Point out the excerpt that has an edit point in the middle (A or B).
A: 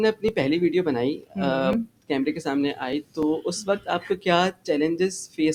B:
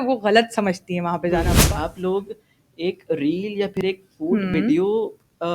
B